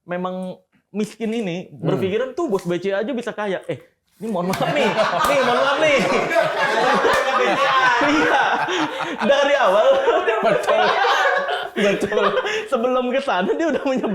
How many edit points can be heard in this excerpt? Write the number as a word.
zero